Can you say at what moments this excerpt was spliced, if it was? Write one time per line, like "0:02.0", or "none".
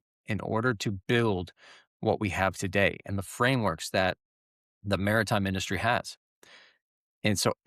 none